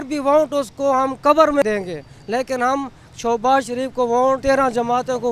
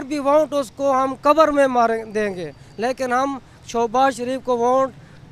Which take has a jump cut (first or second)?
first